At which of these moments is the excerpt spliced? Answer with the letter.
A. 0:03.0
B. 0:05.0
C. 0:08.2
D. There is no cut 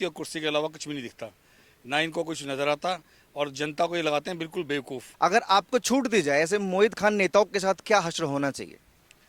B